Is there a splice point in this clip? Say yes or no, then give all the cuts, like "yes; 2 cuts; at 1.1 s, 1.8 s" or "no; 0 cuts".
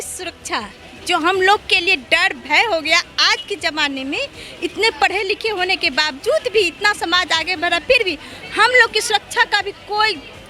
no; 0 cuts